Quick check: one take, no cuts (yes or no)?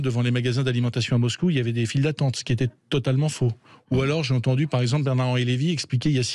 yes